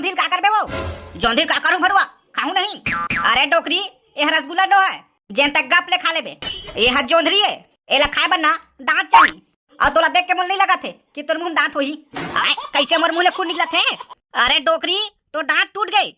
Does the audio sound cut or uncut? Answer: cut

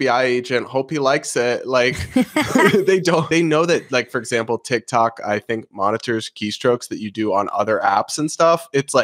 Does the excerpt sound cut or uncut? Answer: cut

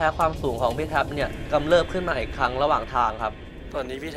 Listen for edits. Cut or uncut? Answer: uncut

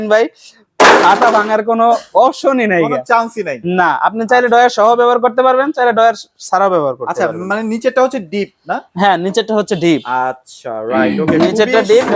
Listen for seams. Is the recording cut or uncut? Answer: uncut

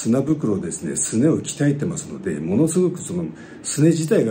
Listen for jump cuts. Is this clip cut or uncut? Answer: uncut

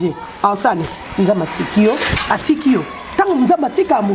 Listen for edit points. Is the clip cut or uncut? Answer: uncut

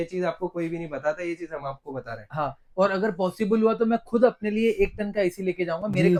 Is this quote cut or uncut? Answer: uncut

